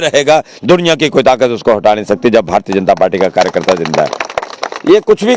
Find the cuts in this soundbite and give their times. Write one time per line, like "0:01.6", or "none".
none